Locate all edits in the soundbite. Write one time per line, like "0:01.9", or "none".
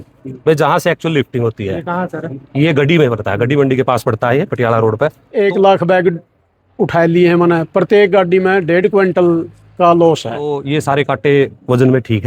0:05.2
0:10.6